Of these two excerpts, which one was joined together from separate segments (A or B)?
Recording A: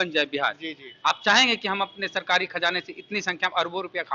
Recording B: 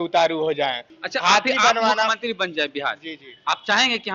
B